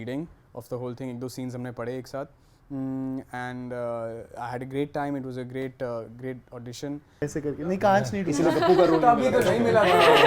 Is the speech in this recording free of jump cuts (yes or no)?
no